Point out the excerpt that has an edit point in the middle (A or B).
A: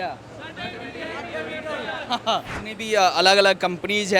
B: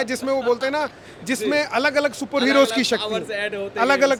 A